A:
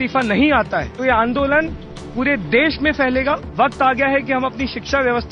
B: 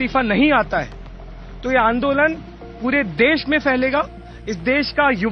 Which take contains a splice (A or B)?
A